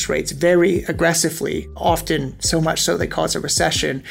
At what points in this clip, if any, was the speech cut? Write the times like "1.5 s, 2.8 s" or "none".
1.7 s